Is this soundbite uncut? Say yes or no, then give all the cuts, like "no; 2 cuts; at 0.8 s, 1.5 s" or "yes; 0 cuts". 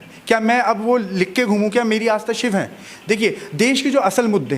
yes; 0 cuts